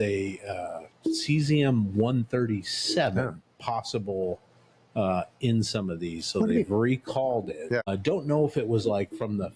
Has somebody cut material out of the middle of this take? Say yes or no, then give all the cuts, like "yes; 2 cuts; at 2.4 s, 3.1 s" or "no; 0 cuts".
yes; 1 cut; at 7.9 s